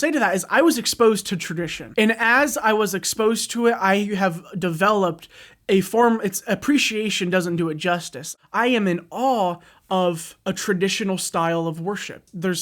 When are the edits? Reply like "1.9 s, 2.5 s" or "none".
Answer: 1.8 s, 8.2 s